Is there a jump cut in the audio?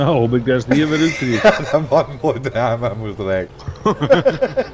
yes; 1 cut; at 3.6 s

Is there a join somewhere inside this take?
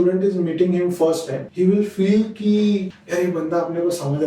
yes; 2 cuts; at 1.4 s, 3.0 s

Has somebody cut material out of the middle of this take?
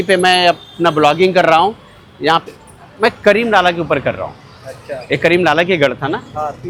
no; 0 cuts

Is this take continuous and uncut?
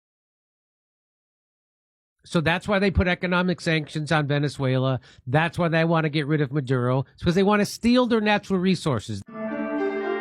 no; 1 cut; at 9.2 s

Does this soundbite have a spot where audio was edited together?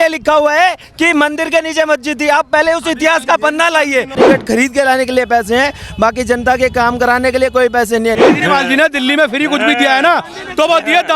yes; 2 cuts; at 4.2 s, 8.2 s

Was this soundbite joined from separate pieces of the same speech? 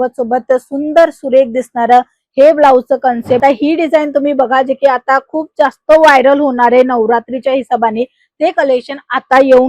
yes; 1 cut; at 3.4 s

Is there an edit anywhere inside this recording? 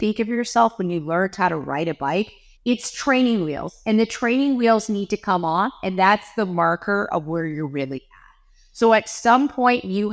yes; 1 cut; at 2.4 s

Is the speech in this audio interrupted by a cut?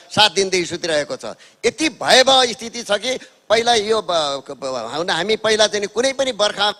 no; 0 cuts

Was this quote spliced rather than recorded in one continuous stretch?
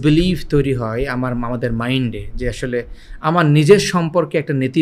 no; 0 cuts

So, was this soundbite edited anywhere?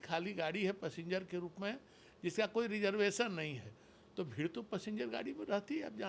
no; 0 cuts

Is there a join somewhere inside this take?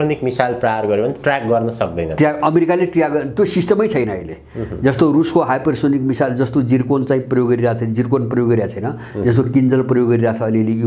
no; 0 cuts

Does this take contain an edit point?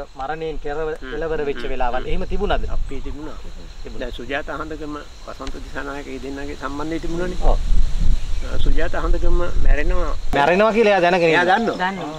yes; 1 cut; at 10.3 s

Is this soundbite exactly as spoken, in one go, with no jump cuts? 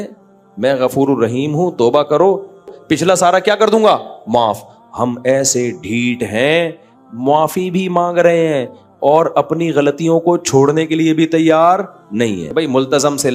no; 2 cuts; at 2.7 s, 12.4 s

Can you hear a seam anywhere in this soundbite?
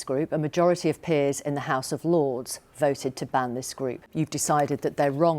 yes; 1 cut; at 4.1 s

